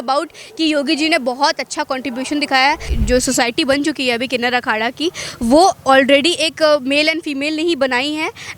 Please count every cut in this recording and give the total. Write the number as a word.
one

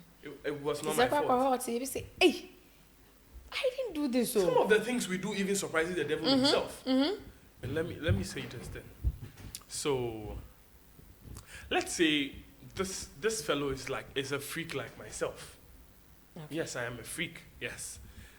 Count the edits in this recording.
one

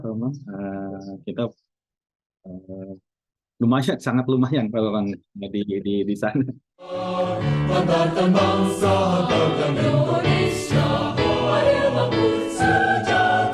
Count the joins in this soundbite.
one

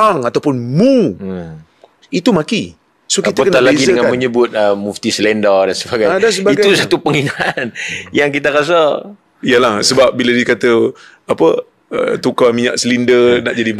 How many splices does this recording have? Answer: zero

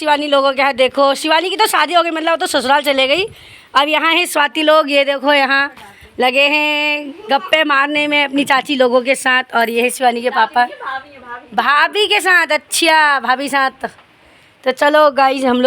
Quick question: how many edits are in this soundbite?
zero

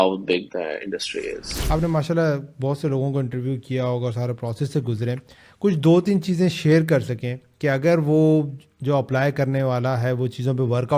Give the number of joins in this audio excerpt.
one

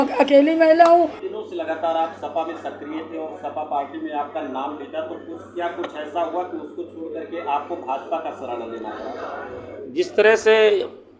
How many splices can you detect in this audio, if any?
one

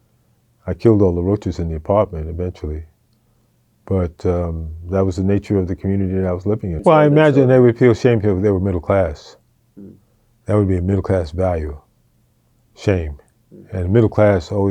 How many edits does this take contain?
one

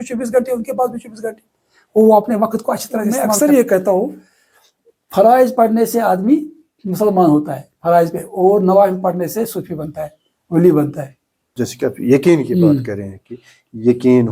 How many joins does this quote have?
two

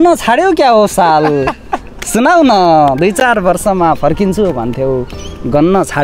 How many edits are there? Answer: zero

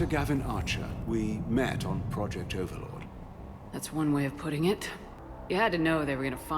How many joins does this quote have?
one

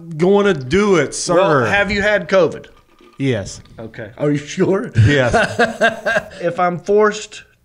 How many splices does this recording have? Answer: one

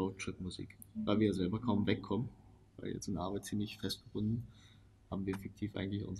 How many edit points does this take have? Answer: zero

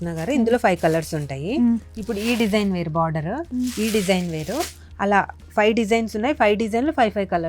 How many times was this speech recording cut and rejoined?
zero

